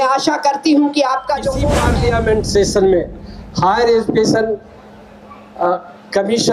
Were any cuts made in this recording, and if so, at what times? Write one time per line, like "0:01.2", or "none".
0:01.7